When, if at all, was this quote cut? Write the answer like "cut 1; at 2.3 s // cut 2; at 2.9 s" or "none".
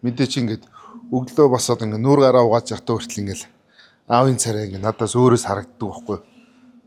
none